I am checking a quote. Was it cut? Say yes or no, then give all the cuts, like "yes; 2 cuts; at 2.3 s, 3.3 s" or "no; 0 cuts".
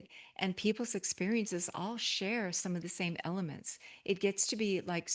no; 0 cuts